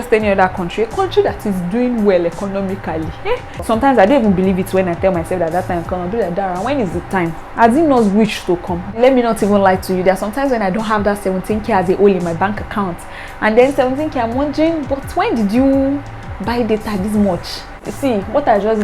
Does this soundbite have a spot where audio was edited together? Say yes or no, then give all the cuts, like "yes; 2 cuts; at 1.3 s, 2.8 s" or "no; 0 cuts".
yes; 3 cuts; at 3.6 s, 8.9 s, 17.9 s